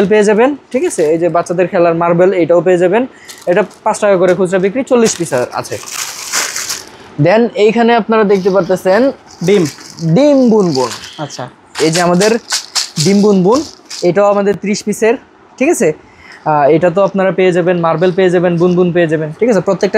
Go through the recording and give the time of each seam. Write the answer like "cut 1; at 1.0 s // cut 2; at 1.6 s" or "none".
none